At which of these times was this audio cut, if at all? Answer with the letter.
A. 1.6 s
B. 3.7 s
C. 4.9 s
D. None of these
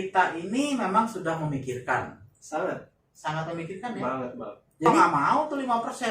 C